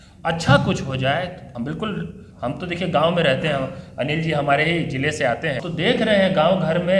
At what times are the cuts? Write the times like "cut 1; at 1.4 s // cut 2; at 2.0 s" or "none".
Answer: cut 1; at 1.4 s // cut 2; at 5.6 s